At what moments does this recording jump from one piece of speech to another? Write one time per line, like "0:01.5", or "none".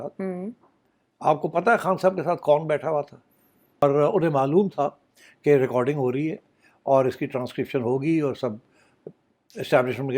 0:03.8